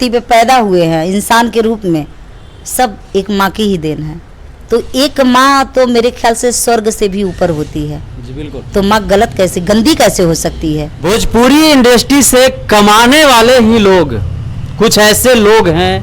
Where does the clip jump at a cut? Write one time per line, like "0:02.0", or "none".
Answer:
0:10.9